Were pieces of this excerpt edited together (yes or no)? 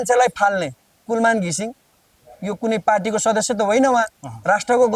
no